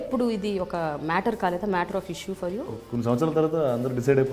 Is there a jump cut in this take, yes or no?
yes